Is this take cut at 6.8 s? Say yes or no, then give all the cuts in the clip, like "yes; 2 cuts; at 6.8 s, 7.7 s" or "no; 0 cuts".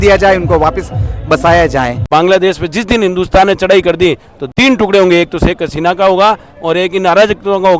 no; 2 cuts; at 2.1 s, 4.3 s